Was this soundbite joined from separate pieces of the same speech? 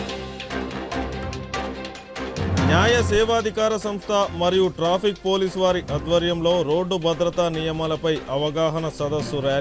no; 0 cuts

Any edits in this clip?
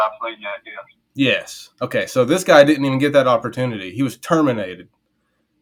no; 0 cuts

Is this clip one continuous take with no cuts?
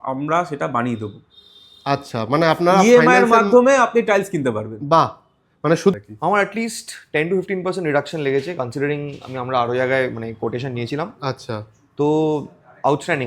no; 1 cut; at 5.9 s

